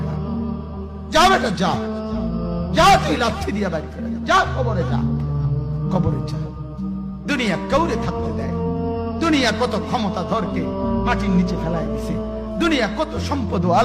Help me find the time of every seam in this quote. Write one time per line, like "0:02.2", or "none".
0:01.0